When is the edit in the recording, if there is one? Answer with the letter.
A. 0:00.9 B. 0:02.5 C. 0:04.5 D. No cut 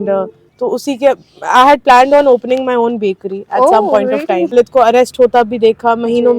C